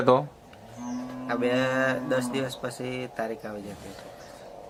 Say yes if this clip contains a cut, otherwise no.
no